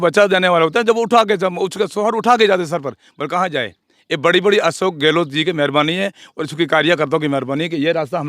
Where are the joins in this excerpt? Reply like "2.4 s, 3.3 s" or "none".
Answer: none